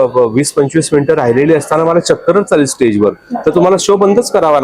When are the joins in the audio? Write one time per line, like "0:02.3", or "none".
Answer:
none